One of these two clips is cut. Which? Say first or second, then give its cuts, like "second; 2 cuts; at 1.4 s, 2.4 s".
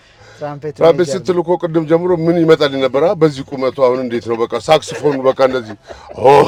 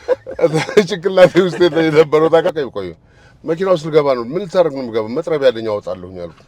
second; 1 cut; at 2.5 s